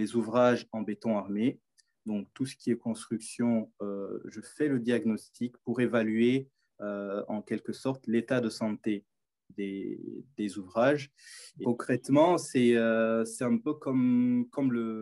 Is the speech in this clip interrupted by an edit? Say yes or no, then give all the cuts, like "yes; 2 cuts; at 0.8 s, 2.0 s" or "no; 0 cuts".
yes; 1 cut; at 11.6 s